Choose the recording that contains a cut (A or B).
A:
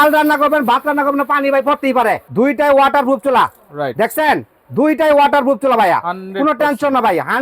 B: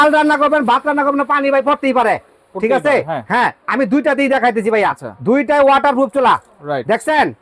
A